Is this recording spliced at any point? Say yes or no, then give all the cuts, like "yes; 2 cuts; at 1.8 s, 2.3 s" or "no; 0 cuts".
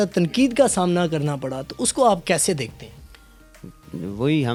no; 0 cuts